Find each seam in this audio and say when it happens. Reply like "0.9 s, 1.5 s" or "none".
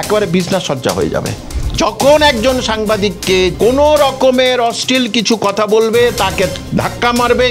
1.4 s, 3.5 s, 6.6 s